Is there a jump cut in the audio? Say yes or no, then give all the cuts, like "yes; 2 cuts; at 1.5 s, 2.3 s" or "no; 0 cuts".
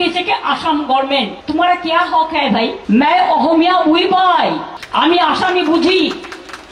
yes; 3 cuts; at 1.4 s, 2.8 s, 4.7 s